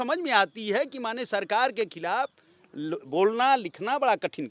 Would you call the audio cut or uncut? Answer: uncut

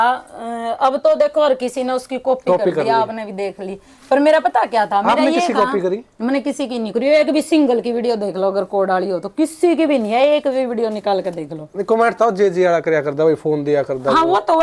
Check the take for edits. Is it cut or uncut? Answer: uncut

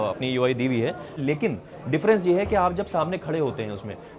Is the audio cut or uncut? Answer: cut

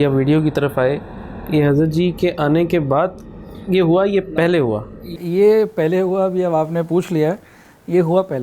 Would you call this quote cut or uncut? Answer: uncut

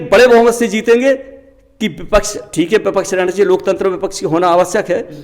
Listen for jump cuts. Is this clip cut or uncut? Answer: uncut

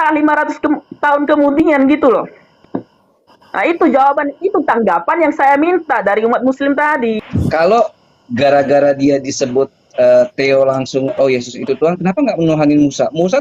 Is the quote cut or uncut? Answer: cut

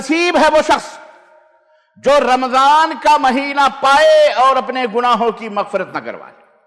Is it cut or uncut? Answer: uncut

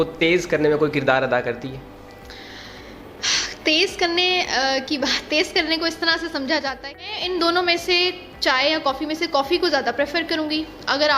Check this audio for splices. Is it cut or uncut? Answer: cut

